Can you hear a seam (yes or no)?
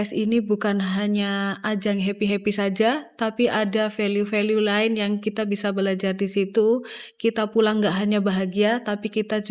no